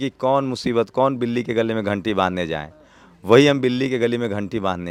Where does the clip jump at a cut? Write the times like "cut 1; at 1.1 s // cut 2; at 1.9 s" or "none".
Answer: none